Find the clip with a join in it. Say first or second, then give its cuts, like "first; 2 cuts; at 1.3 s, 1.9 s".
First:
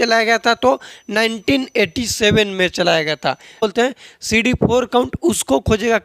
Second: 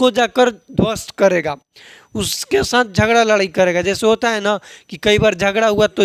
first; 1 cut; at 3.6 s